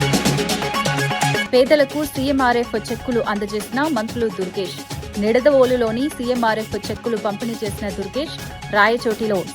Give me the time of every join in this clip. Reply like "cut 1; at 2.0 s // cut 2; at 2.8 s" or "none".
cut 1; at 1.4 s